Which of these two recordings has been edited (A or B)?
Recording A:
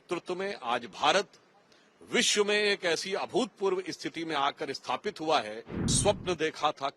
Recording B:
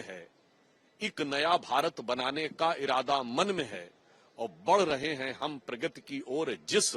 A